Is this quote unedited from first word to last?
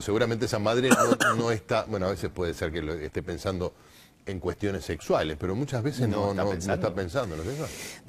yes; 0 cuts

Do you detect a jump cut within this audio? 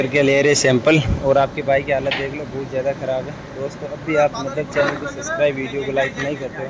no; 0 cuts

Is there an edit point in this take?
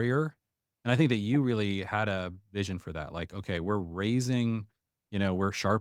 no; 0 cuts

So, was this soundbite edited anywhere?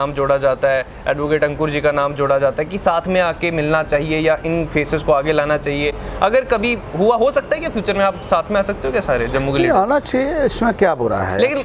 no; 0 cuts

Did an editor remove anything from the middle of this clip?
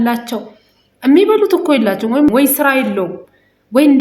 yes; 1 cut; at 2.3 s

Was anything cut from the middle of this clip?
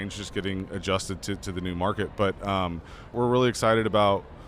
yes; 1 cut; at 3.1 s

